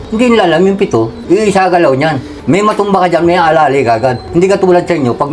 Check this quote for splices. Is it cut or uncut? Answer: uncut